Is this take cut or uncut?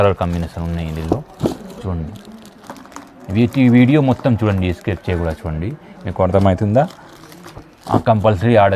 uncut